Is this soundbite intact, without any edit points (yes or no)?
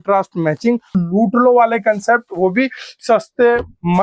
no